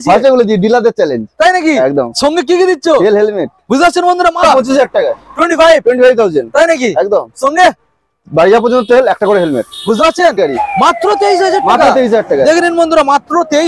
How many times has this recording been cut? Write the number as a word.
two